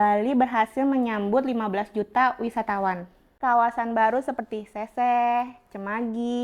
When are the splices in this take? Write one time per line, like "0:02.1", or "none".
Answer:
0:03.4